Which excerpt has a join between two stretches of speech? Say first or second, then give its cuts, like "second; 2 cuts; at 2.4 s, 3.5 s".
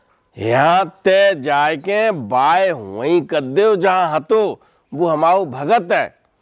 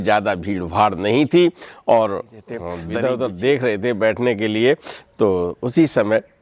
second; 1 cut; at 2.7 s